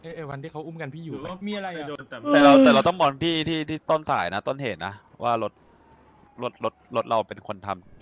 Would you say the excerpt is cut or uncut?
uncut